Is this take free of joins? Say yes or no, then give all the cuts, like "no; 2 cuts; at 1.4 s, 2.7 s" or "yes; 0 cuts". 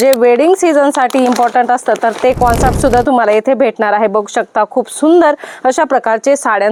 yes; 0 cuts